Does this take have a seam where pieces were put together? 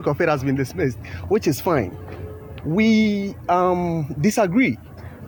no; 0 cuts

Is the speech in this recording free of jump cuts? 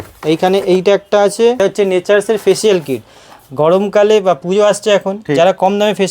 no; 1 cut; at 1.6 s

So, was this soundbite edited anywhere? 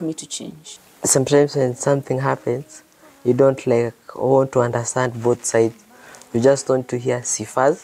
no; 0 cuts

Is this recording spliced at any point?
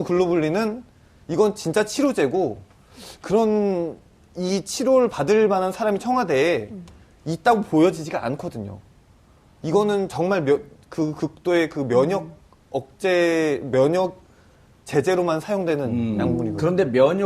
yes; 1 cut; at 7.0 s

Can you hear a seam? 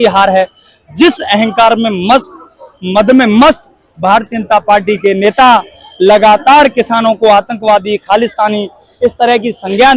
no; 0 cuts

